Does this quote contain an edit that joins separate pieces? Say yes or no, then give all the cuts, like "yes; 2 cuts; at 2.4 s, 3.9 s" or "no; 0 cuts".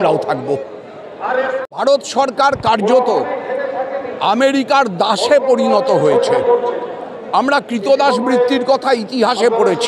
yes; 1 cut; at 1.8 s